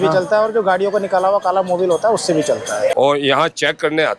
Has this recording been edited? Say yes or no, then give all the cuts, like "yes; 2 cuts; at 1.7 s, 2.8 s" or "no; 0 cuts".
yes; 1 cut; at 2.9 s